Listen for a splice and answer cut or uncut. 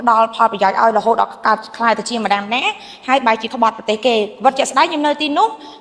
uncut